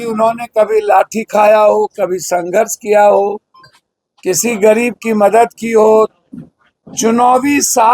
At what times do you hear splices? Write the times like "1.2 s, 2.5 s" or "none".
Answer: none